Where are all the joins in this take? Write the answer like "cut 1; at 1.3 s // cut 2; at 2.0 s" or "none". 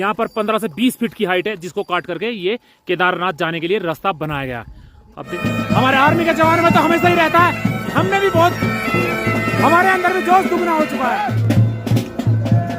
cut 1; at 5.2 s // cut 2; at 11.4 s